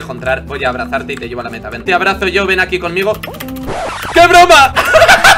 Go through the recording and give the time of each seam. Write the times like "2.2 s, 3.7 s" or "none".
1.8 s